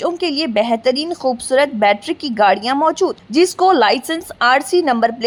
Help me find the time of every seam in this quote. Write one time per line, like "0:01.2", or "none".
none